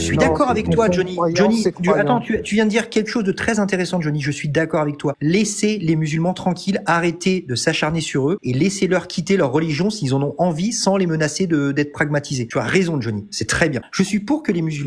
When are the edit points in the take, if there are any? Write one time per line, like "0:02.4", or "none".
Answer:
0:05.2
0:08.4
0:12.4
0:13.9